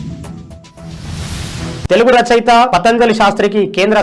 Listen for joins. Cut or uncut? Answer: uncut